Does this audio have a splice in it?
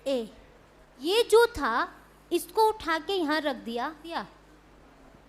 yes; 2 cuts; at 1.0 s, 4.1 s

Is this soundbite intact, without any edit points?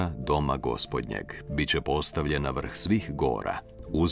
yes; 0 cuts

